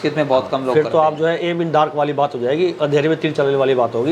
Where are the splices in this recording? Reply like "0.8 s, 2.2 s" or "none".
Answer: none